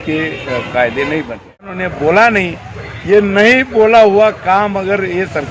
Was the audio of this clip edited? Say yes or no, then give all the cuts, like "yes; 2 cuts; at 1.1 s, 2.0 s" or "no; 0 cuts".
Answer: yes; 1 cut; at 1.8 s